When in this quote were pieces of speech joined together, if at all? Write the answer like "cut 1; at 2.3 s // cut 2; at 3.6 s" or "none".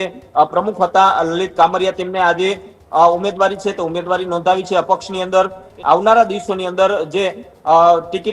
cut 1; at 5.7 s